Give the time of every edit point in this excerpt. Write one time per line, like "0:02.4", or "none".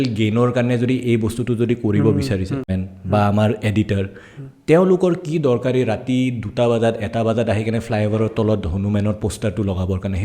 0:02.7